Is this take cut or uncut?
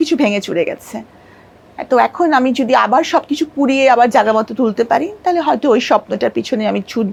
uncut